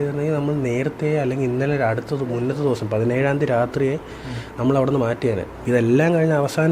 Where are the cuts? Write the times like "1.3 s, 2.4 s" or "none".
5.5 s